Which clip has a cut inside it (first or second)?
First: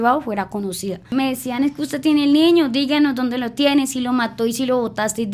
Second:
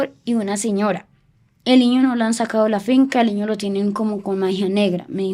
first